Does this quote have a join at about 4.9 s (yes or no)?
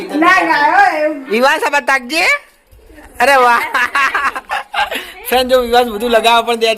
no